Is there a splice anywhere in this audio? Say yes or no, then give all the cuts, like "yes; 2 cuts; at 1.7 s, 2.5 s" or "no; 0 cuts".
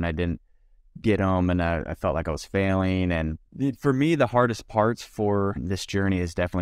yes; 2 cuts; at 3.4 s, 5.6 s